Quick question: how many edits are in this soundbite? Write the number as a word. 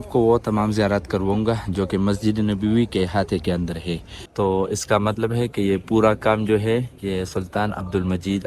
one